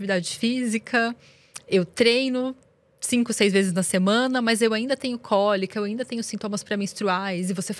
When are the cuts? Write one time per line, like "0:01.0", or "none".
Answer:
none